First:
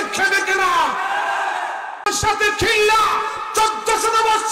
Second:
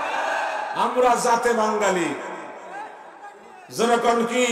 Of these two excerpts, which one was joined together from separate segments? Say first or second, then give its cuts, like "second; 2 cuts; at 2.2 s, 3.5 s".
first; 1 cut; at 2.1 s